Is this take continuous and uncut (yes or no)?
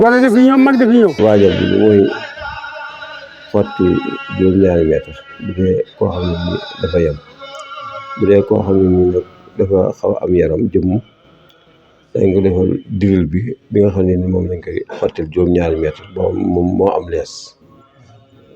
no